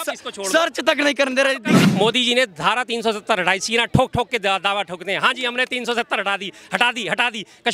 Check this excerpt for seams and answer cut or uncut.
cut